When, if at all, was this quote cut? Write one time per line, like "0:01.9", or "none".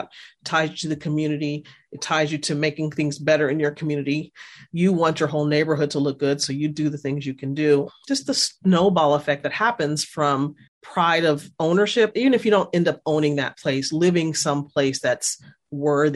none